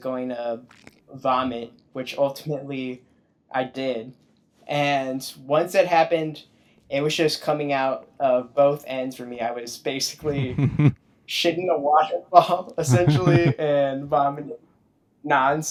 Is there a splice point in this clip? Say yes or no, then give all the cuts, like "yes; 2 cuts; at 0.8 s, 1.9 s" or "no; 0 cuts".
no; 0 cuts